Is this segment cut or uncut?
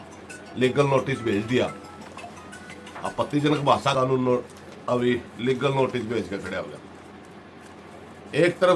cut